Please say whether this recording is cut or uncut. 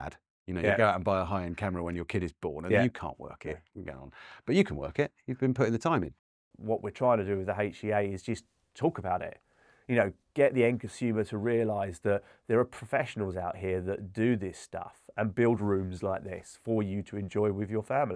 cut